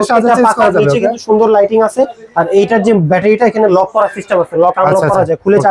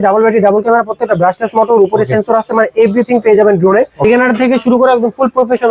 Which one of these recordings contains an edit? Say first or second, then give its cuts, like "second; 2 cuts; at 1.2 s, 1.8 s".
second; 1 cut; at 4.0 s